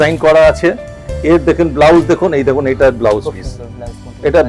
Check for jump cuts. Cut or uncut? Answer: uncut